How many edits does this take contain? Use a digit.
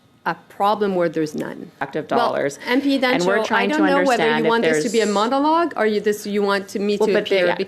1